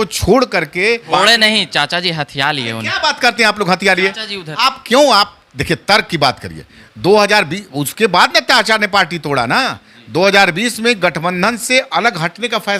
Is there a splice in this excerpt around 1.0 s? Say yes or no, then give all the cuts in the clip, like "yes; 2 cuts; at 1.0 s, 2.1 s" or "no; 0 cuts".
yes; 1 cut; at 1.0 s